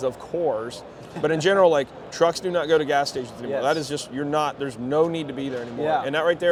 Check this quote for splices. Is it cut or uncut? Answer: uncut